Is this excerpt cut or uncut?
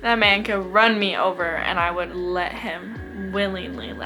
uncut